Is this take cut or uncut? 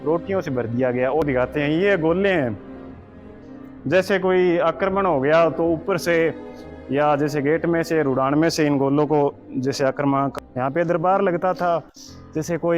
cut